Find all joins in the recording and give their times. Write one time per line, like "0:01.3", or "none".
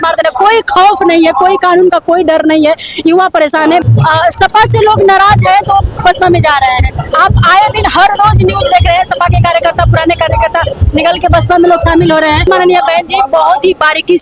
0:03.8
0:12.5